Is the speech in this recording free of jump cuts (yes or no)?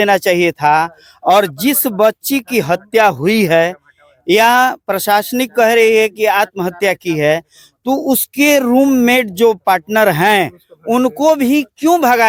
yes